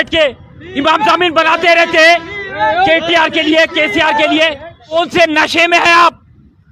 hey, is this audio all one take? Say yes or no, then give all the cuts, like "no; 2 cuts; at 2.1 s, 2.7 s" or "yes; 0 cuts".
no; 1 cut; at 4.9 s